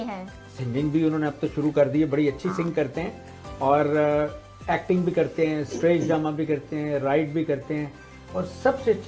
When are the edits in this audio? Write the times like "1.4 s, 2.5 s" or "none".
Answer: none